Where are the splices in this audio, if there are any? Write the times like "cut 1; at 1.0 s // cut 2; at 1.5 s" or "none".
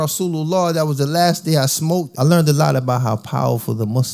cut 1; at 2.1 s